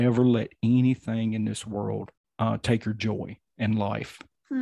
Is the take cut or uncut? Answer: cut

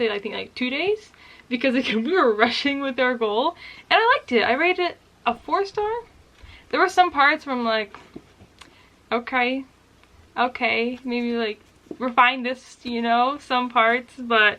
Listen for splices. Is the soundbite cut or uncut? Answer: uncut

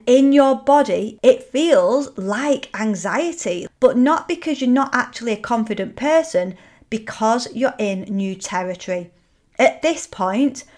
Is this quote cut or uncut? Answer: cut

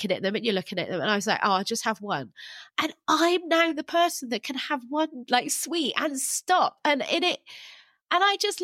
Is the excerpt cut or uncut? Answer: cut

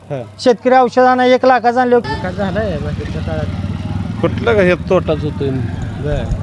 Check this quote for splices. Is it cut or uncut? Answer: cut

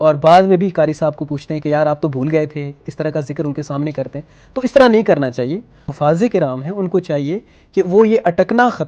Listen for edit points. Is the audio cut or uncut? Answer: cut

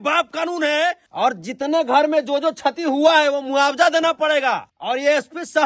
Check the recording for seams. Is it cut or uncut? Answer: cut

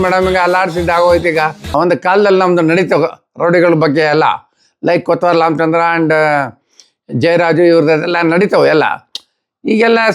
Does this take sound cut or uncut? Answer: cut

